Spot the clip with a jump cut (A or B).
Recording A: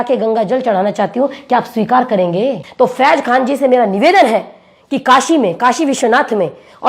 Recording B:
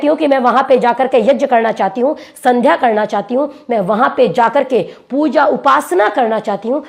A